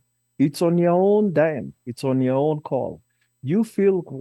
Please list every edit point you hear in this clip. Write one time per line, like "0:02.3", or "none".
none